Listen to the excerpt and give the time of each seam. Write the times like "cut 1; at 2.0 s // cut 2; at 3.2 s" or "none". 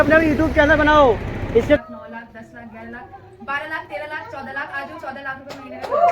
cut 1; at 1.8 s